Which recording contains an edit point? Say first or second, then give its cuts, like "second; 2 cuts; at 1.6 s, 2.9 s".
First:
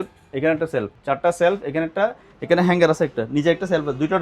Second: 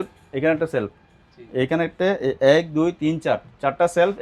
first; 1 cut; at 1.0 s